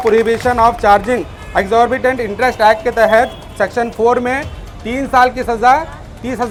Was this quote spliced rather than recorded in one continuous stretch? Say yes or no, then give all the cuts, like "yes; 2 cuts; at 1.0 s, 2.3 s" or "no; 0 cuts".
no; 0 cuts